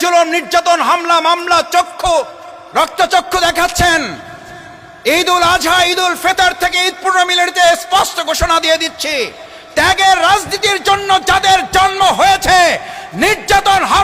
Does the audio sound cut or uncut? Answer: uncut